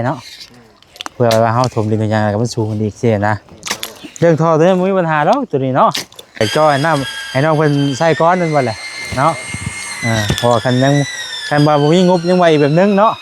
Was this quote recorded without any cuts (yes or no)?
no